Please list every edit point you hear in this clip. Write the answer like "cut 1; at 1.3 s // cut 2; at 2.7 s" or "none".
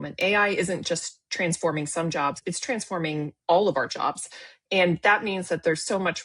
cut 1; at 2.4 s